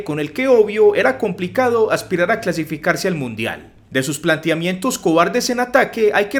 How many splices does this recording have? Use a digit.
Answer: 0